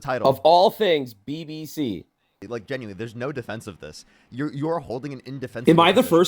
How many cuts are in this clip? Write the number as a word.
one